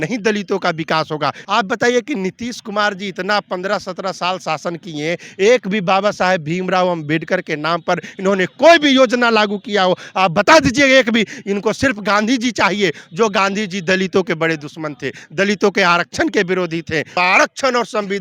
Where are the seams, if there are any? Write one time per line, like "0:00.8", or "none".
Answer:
0:01.4
0:17.2